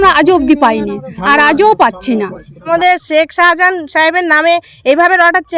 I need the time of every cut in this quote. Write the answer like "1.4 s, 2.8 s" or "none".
2.7 s